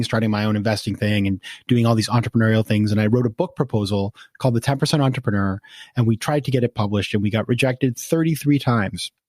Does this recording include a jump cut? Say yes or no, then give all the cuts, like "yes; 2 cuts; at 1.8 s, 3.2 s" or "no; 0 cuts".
no; 0 cuts